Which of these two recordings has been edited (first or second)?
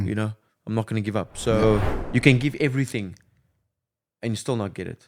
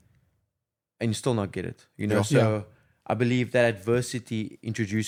first